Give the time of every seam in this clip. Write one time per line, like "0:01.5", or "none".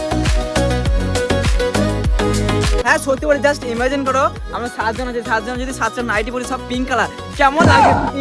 0:02.8